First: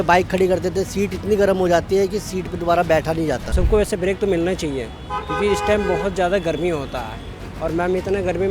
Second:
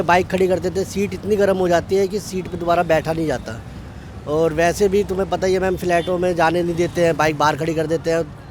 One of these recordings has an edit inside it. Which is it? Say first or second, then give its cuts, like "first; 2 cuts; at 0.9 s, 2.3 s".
first; 1 cut; at 3.5 s